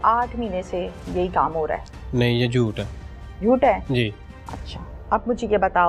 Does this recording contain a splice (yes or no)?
no